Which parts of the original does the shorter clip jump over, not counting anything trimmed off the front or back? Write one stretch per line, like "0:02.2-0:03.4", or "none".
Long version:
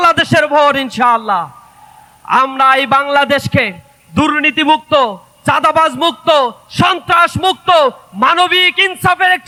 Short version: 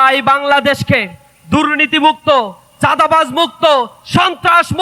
none